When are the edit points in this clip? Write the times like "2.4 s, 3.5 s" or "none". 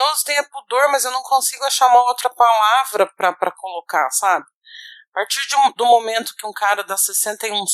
none